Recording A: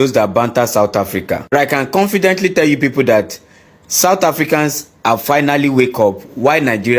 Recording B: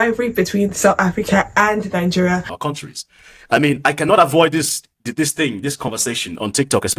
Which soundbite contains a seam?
B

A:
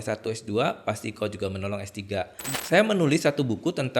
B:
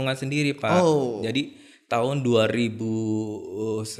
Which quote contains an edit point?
A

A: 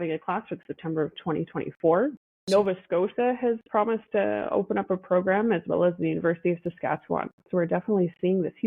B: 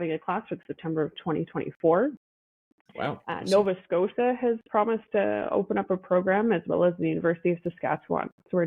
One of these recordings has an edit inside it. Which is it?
A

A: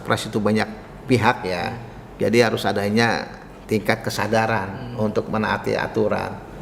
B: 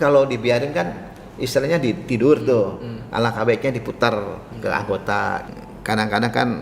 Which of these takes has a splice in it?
B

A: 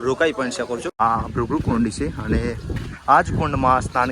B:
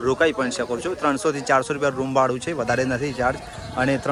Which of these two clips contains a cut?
A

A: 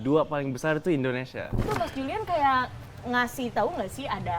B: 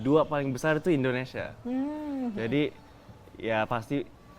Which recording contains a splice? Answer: A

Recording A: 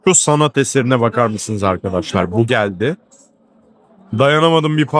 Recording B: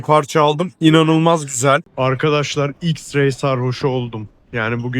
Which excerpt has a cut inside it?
B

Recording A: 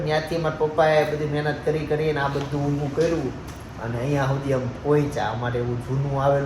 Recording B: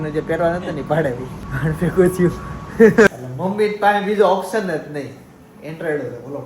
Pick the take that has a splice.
B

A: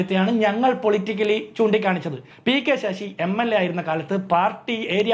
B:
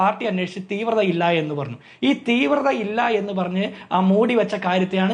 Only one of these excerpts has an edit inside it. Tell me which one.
A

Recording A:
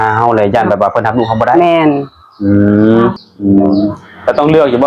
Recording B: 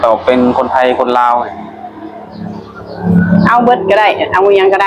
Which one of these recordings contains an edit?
A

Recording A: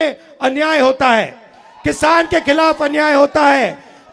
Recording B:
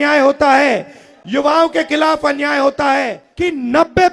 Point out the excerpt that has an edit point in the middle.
B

